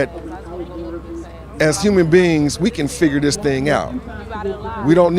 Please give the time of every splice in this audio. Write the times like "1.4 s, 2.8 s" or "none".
4.0 s